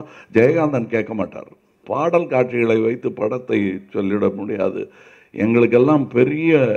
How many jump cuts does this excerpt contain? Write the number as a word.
one